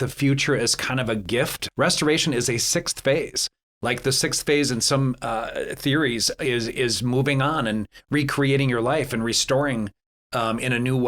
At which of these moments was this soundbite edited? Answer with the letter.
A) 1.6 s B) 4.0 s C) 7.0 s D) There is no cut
A